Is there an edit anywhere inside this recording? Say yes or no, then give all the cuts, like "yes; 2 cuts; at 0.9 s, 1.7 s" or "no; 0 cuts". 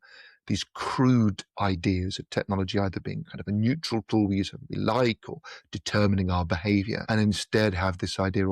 yes; 1 cut; at 7.0 s